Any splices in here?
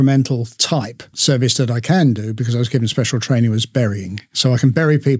yes; 2 cuts; at 1.1 s, 4.4 s

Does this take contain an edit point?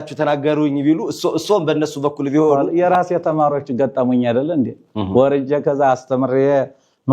yes; 1 cut; at 2.6 s

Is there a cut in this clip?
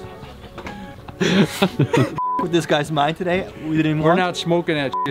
no; 0 cuts

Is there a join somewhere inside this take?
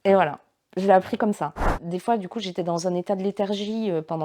yes; 1 cut; at 1.8 s

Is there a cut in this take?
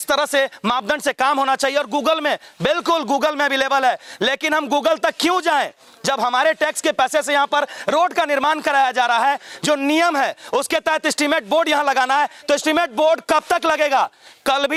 no; 0 cuts

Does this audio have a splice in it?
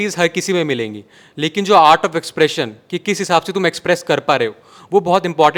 no; 0 cuts

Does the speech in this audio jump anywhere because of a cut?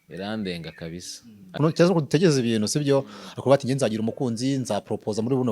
yes; 1 cut; at 1.5 s

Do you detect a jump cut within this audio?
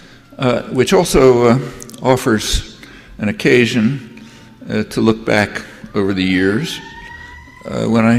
no; 0 cuts

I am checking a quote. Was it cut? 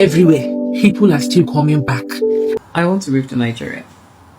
yes; 1 cut; at 2.6 s

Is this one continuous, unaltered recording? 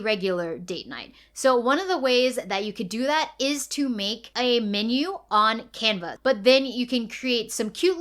no; 1 cut; at 6.1 s

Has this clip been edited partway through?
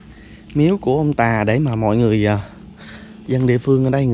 no; 0 cuts

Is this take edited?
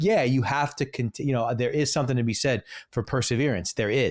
no; 0 cuts

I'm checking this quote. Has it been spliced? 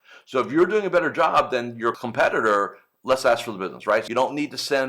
yes; 2 cuts; at 2.0 s, 4.1 s

